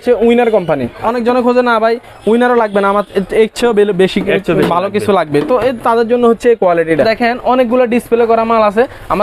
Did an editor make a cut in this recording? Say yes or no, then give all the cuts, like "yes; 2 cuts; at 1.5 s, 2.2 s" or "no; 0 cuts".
yes; 2 cuts; at 1.0 s, 7.0 s